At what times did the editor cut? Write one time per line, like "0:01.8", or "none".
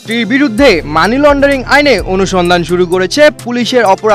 none